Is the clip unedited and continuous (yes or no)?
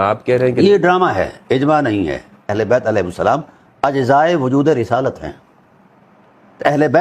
no